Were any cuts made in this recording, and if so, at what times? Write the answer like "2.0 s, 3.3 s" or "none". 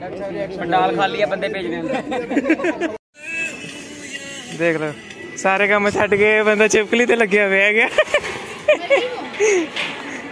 3.2 s